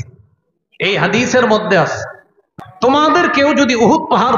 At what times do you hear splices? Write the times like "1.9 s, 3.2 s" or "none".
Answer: 2.5 s